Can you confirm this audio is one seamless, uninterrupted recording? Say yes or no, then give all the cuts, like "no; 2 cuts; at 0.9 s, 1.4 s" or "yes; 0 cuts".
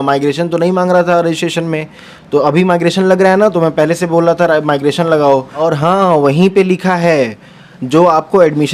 no; 1 cut; at 5.6 s